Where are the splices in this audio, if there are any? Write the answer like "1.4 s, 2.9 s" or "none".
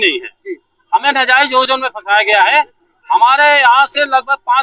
none